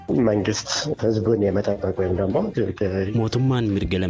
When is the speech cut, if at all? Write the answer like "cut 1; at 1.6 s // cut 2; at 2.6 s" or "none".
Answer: cut 1; at 0.9 s

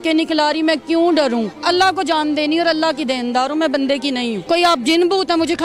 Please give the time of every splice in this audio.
cut 1; at 1.6 s // cut 2; at 4.4 s

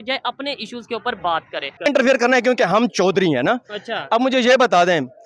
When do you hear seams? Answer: cut 1; at 1.9 s

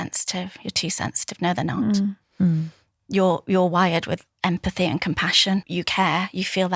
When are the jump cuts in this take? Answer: cut 1; at 5.7 s

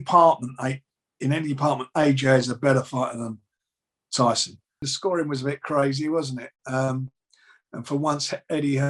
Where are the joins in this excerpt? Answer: cut 1; at 4.8 s

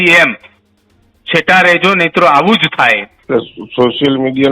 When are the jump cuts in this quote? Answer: cut 1; at 3.1 s

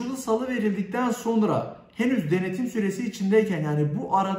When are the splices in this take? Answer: none

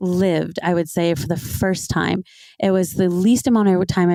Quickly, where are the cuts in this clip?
none

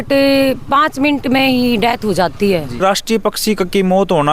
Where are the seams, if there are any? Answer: cut 1; at 2.8 s

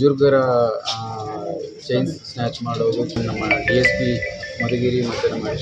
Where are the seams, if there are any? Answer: cut 1; at 3.1 s

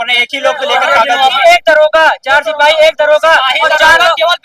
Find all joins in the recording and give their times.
cut 1; at 1.4 s

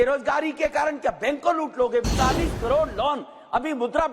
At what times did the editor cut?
cut 1; at 2.0 s

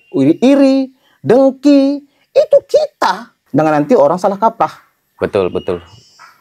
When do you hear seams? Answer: cut 1; at 3.3 s

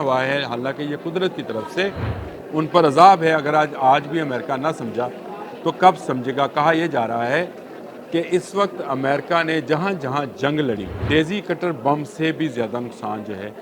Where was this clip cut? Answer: cut 1; at 10.9 s

